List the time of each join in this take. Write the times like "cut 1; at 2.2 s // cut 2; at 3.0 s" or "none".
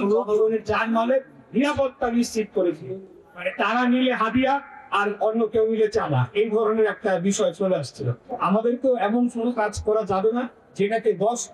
cut 1; at 2.9 s // cut 2; at 8.3 s